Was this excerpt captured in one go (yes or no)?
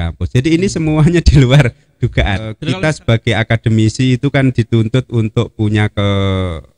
no